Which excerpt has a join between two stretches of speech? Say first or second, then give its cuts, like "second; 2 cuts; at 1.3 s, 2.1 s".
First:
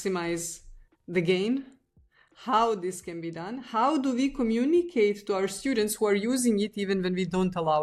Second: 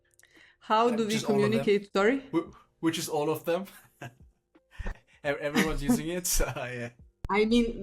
second; 1 cut; at 1.9 s